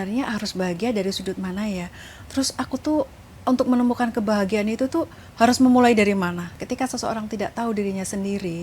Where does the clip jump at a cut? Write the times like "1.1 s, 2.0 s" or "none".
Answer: 6.5 s